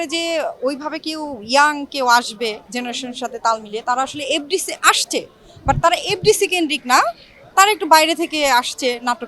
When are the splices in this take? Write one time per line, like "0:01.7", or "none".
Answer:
none